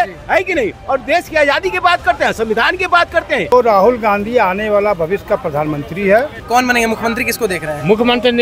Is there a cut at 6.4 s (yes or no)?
yes